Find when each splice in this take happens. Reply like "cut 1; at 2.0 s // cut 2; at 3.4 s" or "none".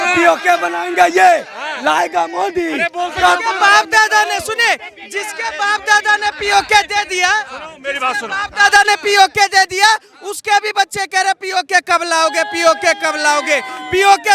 none